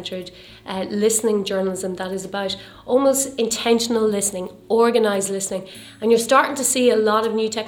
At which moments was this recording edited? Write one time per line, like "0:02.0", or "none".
none